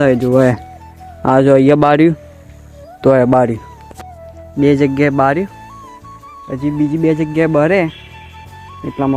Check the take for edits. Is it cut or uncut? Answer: uncut